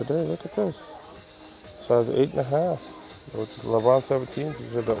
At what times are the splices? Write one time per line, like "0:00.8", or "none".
none